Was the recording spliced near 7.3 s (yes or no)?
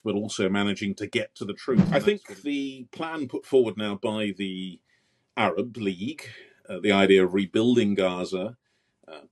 no